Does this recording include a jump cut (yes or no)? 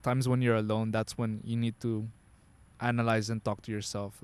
no